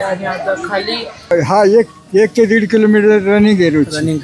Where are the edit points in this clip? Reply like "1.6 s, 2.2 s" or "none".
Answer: 1.3 s